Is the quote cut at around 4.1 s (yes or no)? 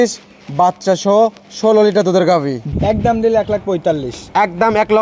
no